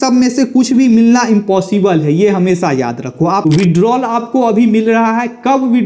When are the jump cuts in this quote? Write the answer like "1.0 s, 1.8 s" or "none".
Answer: 3.4 s